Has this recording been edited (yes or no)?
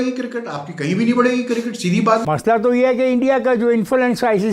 yes